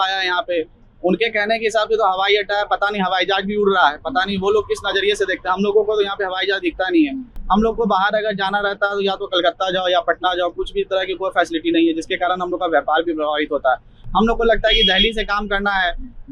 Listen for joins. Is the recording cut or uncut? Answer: uncut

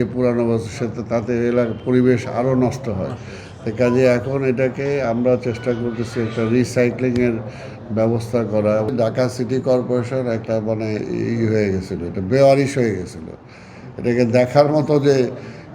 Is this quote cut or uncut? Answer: cut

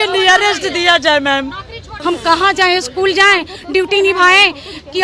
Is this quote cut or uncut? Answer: cut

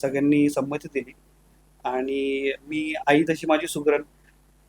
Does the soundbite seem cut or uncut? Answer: uncut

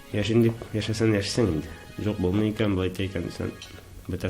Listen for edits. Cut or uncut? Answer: uncut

